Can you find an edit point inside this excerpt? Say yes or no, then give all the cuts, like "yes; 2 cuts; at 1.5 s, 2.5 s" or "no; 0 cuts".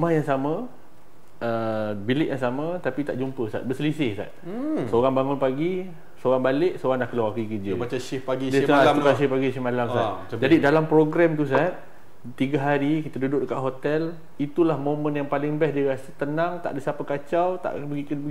no; 0 cuts